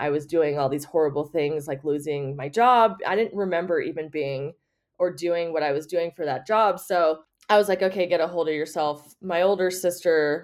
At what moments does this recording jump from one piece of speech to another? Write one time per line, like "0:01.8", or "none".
0:07.3